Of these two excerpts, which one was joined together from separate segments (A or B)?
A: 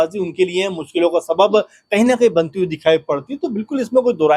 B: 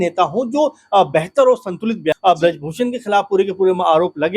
B